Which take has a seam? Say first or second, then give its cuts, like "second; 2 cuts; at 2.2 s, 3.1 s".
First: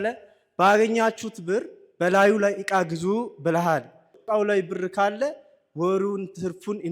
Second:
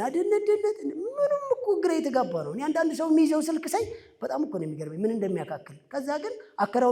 first; 1 cut; at 4.1 s